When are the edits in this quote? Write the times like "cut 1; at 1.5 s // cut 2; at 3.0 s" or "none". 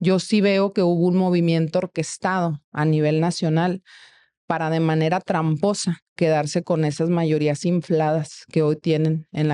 none